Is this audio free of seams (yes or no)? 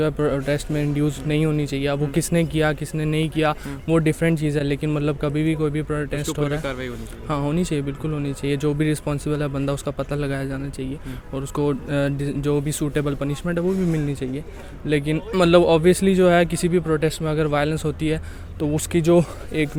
yes